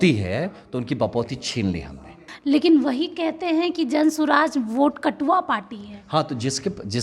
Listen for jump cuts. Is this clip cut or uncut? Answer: cut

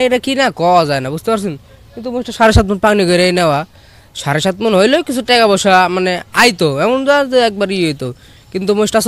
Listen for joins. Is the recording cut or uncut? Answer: uncut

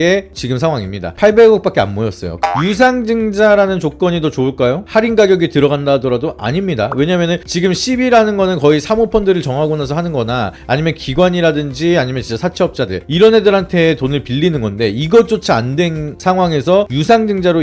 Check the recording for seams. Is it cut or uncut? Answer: cut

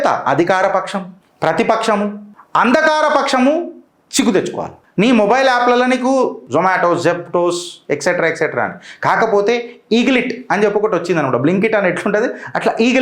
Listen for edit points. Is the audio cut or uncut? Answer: cut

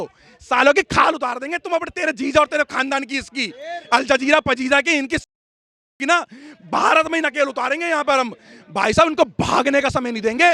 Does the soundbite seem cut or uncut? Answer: uncut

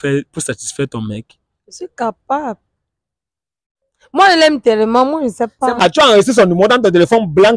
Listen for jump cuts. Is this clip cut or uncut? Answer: cut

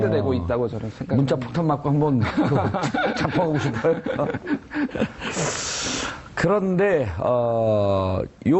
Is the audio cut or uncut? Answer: cut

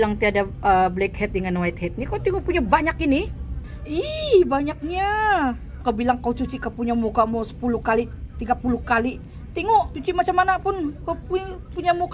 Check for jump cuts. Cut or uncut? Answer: cut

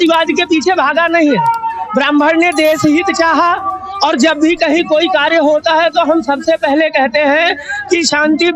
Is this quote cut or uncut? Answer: uncut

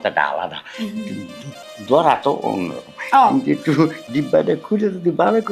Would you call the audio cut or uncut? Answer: uncut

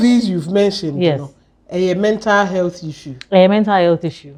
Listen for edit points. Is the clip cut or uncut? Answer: uncut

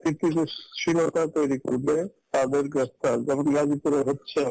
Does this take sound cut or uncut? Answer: cut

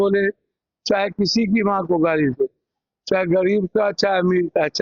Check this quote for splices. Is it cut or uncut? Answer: uncut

